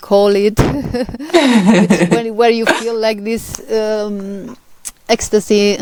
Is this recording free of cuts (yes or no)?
yes